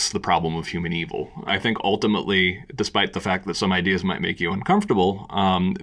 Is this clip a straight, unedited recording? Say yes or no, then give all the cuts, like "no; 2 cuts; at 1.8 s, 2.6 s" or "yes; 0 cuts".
no; 1 cut; at 1.5 s